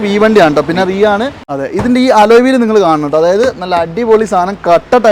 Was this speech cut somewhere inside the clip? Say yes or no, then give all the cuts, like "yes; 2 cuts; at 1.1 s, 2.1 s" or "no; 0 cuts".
yes; 1 cut; at 1.5 s